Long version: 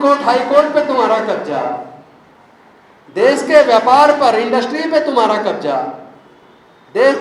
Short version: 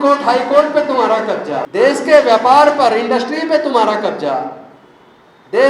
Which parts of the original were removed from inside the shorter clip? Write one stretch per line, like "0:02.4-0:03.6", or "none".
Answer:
0:01.6-0:03.1